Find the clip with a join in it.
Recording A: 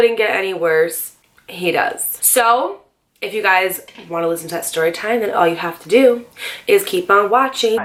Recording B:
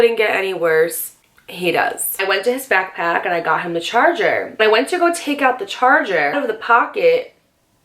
B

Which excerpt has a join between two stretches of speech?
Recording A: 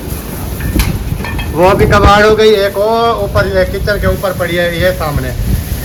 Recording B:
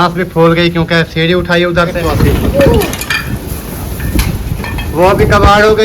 B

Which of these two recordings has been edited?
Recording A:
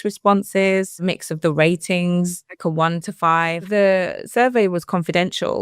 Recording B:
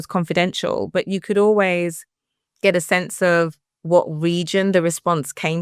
A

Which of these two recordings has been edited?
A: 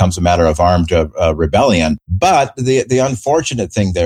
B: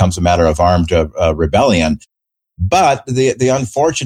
A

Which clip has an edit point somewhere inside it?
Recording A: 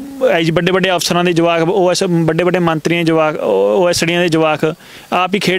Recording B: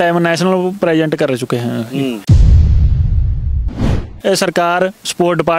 B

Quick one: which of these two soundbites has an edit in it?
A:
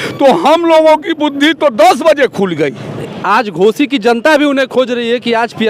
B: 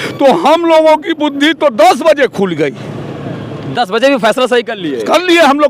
A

